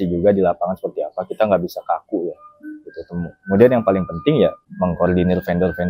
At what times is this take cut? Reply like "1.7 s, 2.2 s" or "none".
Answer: 4.6 s